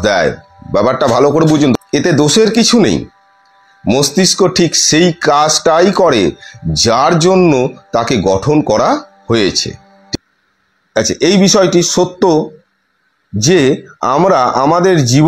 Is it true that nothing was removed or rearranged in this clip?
no; 2 cuts; at 1.8 s, 9.9 s

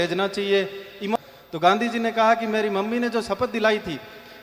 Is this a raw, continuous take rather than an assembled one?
no; 1 cut; at 1.2 s

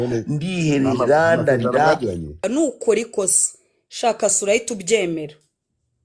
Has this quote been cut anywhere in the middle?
yes; 1 cut; at 2.4 s

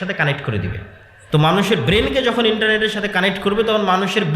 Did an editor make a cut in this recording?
yes; 1 cut; at 1.1 s

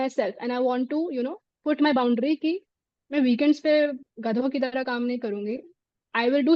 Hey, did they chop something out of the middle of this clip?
no; 0 cuts

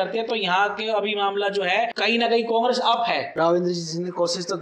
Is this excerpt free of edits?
no; 2 cuts; at 2.0 s, 3.3 s

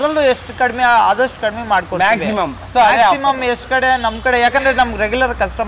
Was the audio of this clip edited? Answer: no; 0 cuts

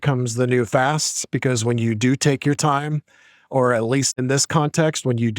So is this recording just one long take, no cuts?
no; 1 cut; at 4.1 s

